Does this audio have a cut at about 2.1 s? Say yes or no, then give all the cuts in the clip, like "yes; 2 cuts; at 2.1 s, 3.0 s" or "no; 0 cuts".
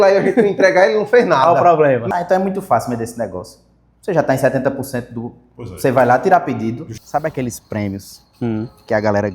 yes; 2 cuts; at 2.1 s, 6.9 s